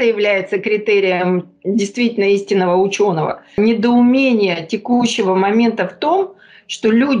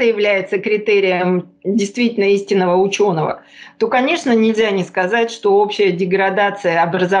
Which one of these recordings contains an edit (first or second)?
first